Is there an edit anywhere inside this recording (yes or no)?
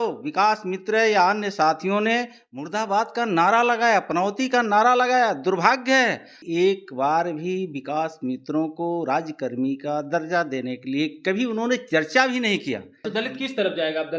yes